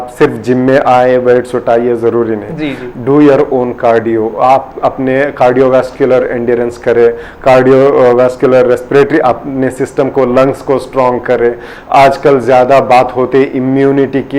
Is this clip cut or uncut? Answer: uncut